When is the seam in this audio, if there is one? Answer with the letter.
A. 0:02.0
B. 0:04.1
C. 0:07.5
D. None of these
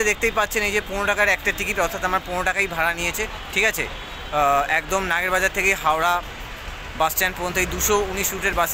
D